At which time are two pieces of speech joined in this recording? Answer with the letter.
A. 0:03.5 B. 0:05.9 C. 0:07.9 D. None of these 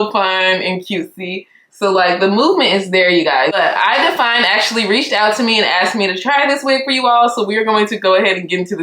A